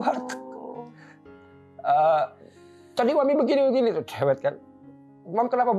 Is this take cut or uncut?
uncut